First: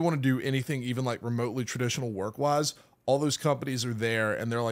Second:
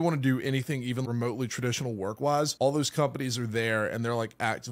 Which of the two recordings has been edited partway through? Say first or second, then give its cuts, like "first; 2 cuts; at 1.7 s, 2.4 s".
second; 2 cuts; at 1.0 s, 2.2 s